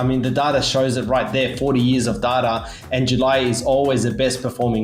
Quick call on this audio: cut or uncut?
uncut